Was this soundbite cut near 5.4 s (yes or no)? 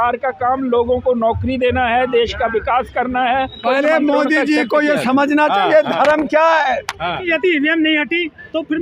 no